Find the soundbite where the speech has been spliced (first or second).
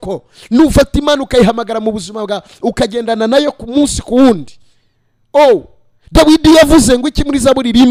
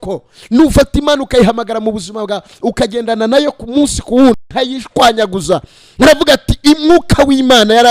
second